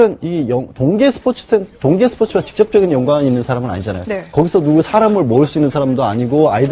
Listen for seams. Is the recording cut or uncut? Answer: cut